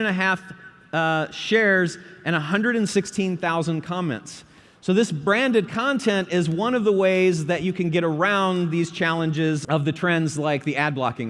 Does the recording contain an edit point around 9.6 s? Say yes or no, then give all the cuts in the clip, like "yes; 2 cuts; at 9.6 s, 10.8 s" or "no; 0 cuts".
yes; 1 cut; at 9.6 s